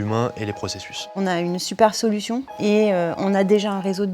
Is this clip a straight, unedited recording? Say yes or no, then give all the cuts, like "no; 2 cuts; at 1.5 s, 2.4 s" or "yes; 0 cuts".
no; 2 cuts; at 1.1 s, 2.5 s